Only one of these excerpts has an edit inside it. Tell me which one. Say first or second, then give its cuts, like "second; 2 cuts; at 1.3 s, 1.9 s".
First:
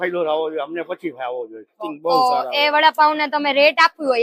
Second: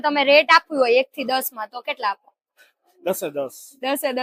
first; 1 cut; at 1.9 s